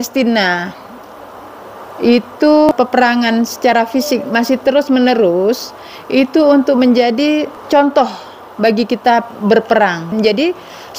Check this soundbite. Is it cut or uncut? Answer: cut